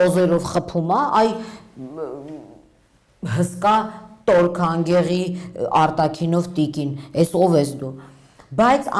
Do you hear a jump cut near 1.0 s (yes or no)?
no